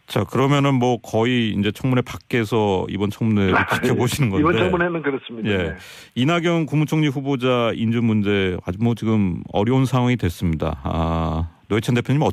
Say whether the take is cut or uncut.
uncut